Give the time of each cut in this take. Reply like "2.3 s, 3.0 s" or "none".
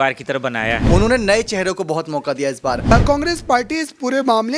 0.8 s, 2.9 s